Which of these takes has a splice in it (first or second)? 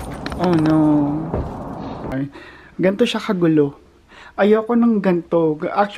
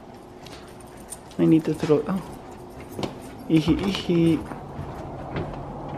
first